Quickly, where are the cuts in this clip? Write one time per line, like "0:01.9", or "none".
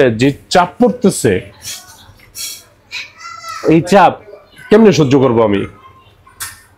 none